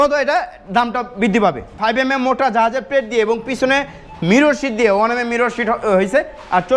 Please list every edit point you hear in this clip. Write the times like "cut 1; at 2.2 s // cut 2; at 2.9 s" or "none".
none